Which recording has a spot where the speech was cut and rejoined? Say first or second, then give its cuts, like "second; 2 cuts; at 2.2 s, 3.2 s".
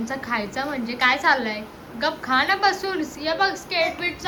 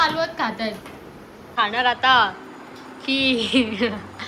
second; 1 cut; at 1.5 s